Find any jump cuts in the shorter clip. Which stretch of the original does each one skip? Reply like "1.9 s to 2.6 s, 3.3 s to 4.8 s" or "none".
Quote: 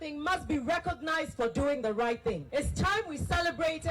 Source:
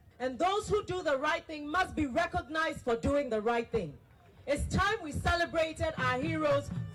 3.9 s to 4.4 s